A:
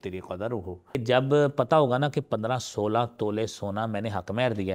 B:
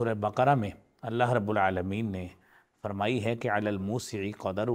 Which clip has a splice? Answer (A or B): A